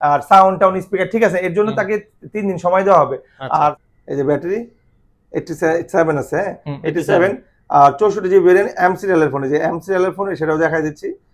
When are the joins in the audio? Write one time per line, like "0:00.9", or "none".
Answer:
0:03.8